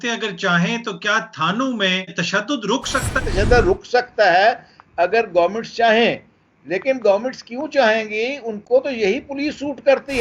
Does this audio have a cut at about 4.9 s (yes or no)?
no